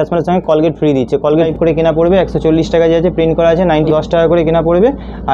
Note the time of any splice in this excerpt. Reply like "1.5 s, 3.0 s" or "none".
1.5 s, 3.9 s